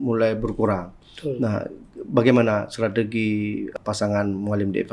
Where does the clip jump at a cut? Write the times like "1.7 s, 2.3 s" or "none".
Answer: 3.7 s